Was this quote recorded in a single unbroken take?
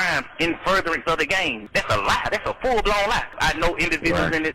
no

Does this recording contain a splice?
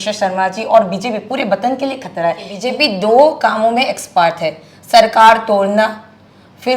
yes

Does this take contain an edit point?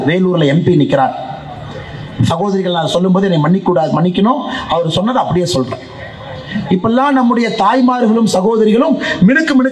no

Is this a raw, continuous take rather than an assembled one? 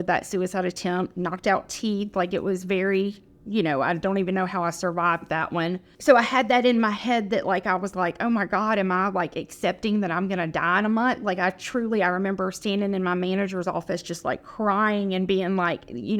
no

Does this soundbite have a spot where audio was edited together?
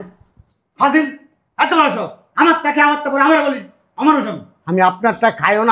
no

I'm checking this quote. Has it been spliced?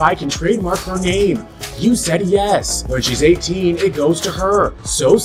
no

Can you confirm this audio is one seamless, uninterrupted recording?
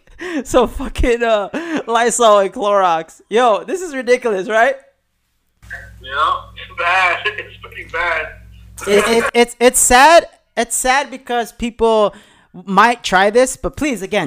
yes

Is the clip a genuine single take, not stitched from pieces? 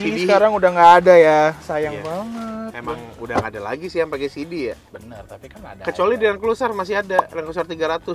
yes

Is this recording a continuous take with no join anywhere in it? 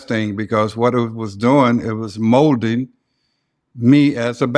yes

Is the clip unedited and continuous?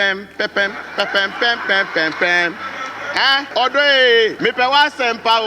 no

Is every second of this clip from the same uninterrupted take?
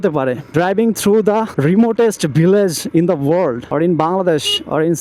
yes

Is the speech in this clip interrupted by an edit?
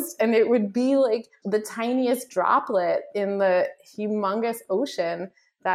yes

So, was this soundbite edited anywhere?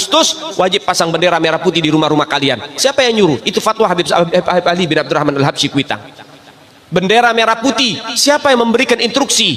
no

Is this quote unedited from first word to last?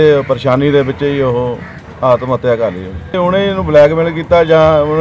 no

